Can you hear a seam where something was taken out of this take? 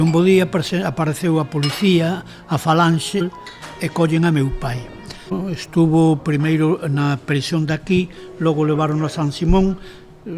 yes; 2 cuts; at 3.2 s, 5.4 s

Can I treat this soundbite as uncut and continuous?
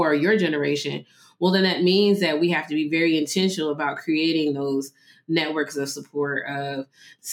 yes; 0 cuts

